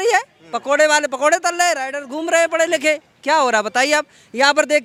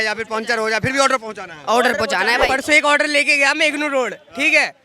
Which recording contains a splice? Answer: second; 1 cut; at 2.5 s

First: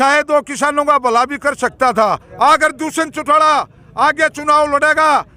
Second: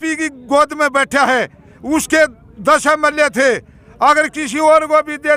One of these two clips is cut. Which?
first; 1 cut; at 2.3 s

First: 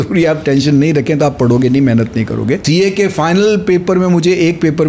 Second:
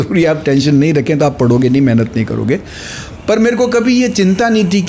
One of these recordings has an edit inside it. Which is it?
first; 1 cut; at 2.6 s

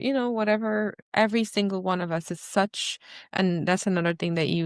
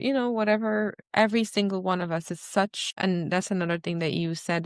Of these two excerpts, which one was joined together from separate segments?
second; 1 cut; at 2.8 s

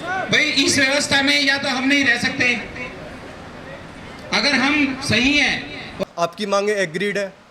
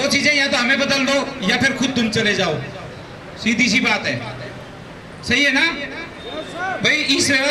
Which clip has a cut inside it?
first; 1 cut; at 6.0 s

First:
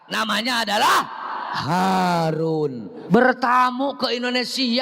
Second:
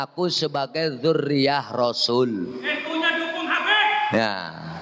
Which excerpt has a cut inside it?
first; 1 cut; at 2.9 s

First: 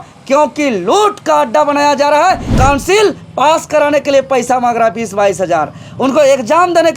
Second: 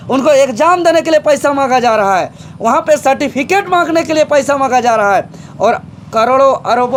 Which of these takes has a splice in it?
first; 1 cut; at 2.5 s

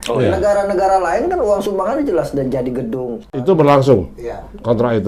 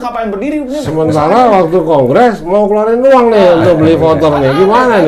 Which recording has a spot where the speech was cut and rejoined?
first; 1 cut; at 3.2 s

